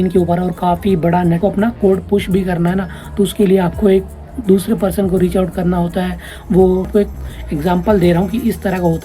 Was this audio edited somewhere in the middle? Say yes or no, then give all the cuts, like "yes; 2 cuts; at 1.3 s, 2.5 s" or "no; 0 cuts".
yes; 2 cuts; at 1.4 s, 6.9 s